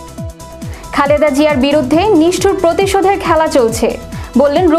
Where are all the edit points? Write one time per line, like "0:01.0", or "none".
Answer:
0:00.9